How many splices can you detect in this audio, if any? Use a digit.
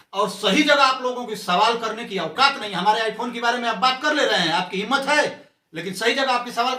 0